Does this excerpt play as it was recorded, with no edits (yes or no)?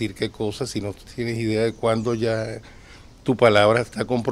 yes